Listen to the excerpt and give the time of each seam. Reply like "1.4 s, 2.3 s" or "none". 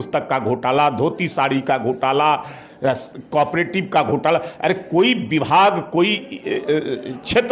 none